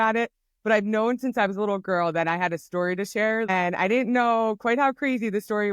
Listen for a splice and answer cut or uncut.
cut